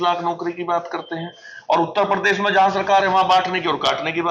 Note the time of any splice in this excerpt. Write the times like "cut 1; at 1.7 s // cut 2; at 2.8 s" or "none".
none